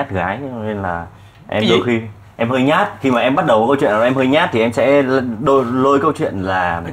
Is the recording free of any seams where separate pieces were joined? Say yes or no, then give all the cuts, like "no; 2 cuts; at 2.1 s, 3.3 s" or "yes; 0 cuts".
yes; 0 cuts